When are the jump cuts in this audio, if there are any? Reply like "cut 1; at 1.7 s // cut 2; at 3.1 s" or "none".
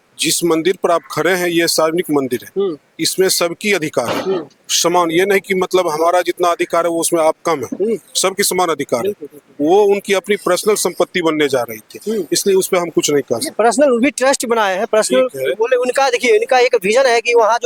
none

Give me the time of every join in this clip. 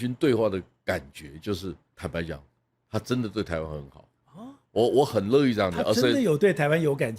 cut 1; at 1.9 s

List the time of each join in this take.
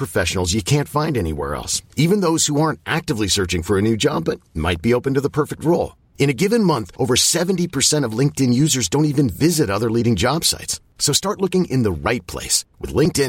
none

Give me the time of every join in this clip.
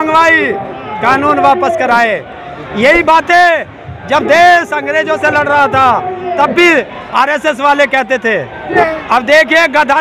cut 1; at 8.8 s

